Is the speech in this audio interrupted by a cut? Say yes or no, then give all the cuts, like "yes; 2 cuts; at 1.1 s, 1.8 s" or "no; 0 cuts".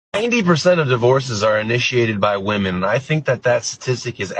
no; 0 cuts